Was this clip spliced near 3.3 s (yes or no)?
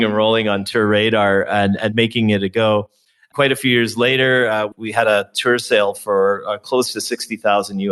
yes